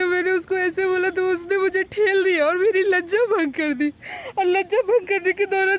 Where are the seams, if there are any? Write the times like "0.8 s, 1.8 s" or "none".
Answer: none